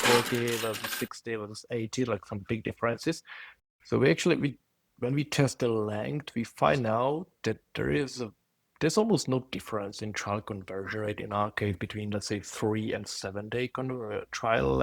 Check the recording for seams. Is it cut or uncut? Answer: cut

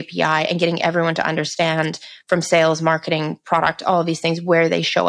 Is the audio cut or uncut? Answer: uncut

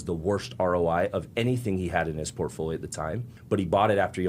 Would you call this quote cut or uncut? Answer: cut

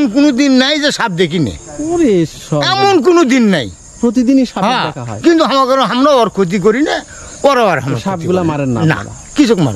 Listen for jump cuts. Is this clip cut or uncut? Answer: uncut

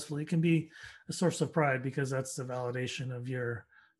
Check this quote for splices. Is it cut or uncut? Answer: uncut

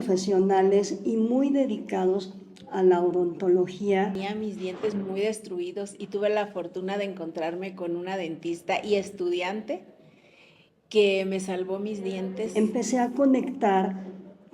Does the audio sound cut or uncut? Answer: cut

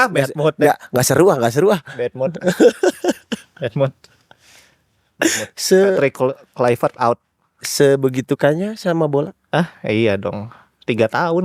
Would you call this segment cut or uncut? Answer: uncut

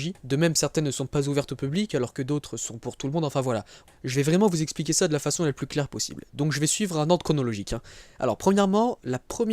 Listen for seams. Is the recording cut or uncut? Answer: cut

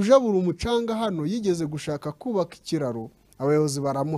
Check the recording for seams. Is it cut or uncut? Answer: uncut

